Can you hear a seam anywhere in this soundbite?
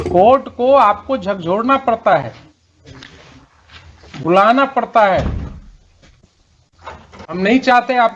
yes; 1 cut; at 7.3 s

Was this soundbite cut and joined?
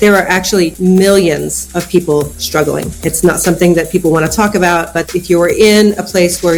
no; 0 cuts

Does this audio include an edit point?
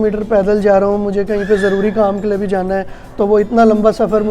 no; 0 cuts

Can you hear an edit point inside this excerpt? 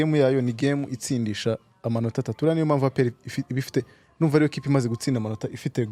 no; 0 cuts

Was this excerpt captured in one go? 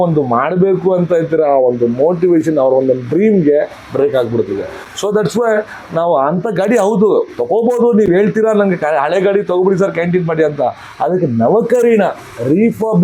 yes; 0 cuts

